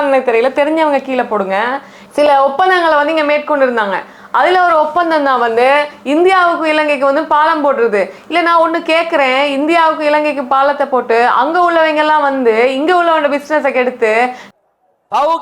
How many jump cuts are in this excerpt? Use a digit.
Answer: 2